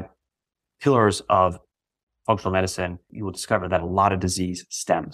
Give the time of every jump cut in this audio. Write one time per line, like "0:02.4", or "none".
0:03.1